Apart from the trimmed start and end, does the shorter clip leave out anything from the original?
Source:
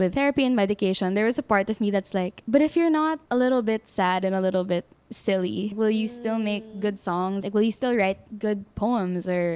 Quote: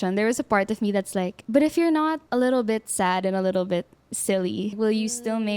no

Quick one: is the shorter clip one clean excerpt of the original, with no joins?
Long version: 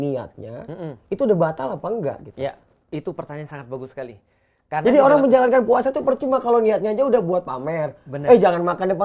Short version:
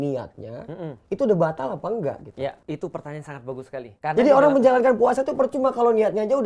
no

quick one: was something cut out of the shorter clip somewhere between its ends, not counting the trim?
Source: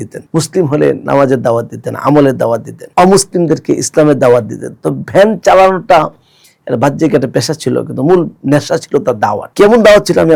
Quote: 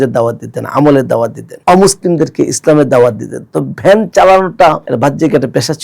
yes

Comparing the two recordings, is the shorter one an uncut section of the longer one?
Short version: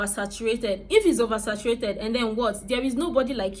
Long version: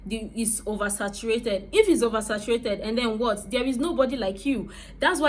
yes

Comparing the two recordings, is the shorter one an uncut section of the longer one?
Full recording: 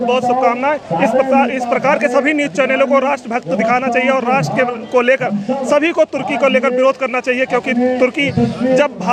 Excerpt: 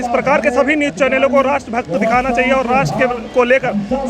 yes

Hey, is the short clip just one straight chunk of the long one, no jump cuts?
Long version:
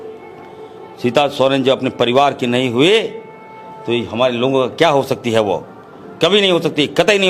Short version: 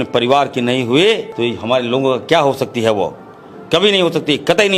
no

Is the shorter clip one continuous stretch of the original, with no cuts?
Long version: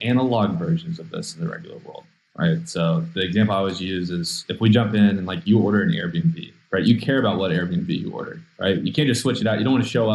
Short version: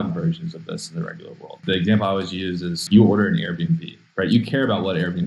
no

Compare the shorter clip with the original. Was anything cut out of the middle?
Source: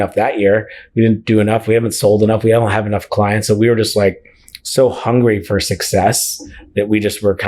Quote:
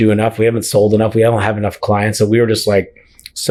no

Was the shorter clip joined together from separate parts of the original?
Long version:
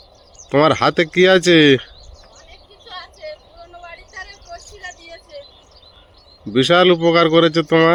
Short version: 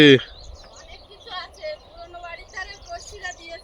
no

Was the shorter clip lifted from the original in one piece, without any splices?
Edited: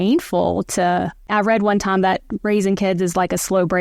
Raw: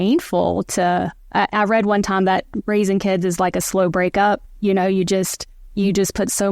no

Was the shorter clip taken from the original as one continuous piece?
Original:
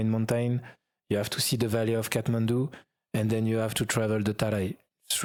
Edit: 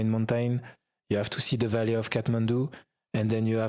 yes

